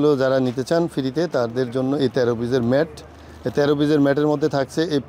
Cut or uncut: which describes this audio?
uncut